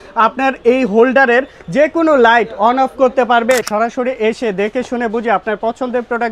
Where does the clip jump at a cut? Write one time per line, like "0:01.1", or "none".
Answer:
0:03.6